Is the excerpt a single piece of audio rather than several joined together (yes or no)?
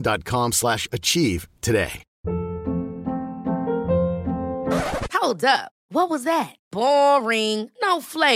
yes